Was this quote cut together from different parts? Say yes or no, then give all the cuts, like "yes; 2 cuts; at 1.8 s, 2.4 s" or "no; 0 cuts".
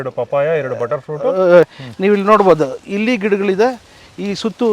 yes; 1 cut; at 1.7 s